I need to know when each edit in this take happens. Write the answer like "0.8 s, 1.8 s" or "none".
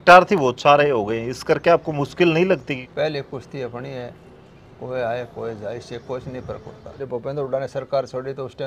2.8 s, 7.0 s